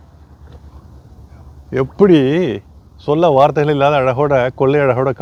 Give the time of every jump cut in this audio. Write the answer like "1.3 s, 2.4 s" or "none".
none